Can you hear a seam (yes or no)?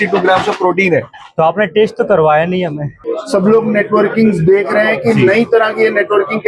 yes